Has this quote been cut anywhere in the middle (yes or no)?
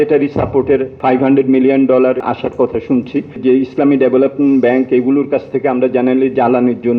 yes